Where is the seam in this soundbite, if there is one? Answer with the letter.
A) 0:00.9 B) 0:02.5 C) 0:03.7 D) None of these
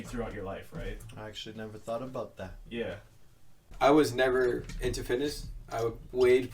C